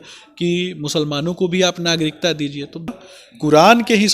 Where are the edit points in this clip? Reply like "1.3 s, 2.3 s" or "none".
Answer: 2.9 s